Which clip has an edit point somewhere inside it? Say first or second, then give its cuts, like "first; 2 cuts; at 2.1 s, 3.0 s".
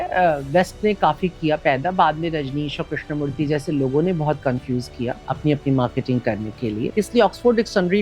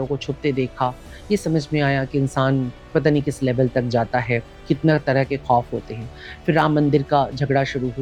first; 2 cuts; at 5.2 s, 6.9 s